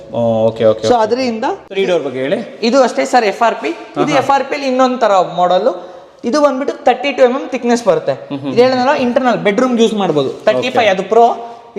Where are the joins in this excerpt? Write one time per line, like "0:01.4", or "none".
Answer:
0:01.6